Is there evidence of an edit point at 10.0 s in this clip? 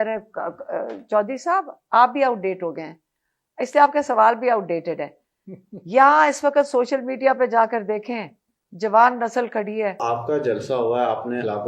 yes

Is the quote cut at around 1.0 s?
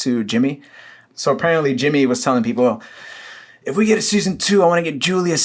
yes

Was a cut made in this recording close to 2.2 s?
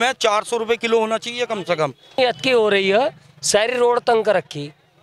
yes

